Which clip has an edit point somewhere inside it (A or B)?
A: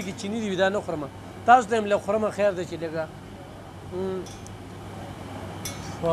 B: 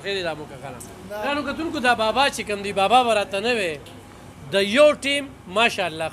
B